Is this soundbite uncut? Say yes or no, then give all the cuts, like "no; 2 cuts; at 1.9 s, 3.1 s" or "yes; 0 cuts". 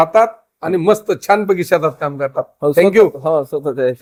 yes; 0 cuts